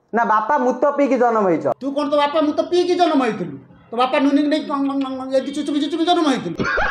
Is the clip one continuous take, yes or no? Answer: no